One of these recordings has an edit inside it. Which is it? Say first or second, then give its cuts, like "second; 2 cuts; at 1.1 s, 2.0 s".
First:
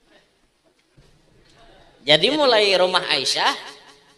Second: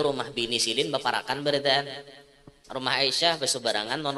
first; 1 cut; at 0.9 s